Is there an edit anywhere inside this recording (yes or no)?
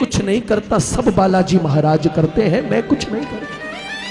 no